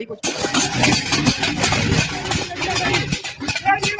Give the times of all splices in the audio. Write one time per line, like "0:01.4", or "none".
none